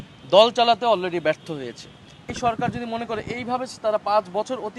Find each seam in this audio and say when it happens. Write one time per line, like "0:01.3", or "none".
0:02.3